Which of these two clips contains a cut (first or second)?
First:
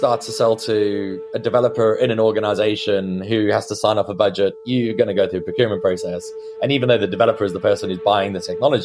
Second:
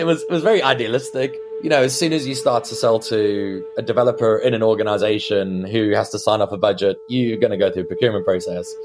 second